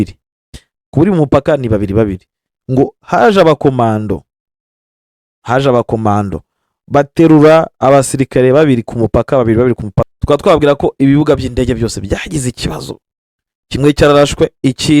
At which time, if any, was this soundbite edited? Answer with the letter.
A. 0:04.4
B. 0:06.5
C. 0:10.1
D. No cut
C